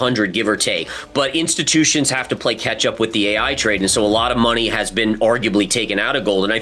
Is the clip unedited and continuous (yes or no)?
no